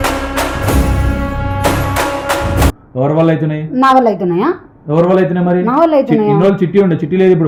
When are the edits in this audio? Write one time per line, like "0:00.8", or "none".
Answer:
none